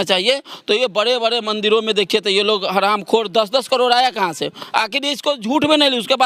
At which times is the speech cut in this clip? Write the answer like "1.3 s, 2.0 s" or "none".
none